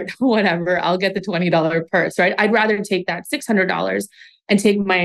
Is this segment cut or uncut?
uncut